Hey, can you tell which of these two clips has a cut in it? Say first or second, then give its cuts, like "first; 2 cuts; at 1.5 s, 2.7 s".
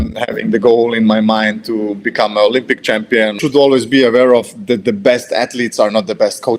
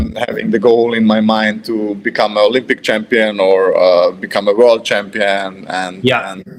first; 1 cut; at 3.3 s